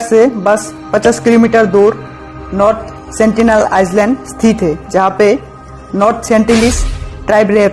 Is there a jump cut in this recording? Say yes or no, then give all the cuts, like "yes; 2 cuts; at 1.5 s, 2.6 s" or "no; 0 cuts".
no; 0 cuts